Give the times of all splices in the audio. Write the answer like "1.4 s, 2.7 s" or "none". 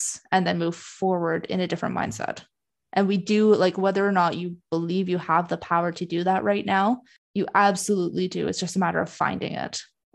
7.2 s